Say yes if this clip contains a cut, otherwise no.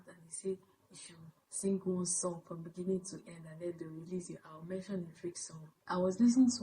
yes